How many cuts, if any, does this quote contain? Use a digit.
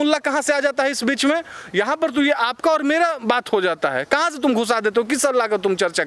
0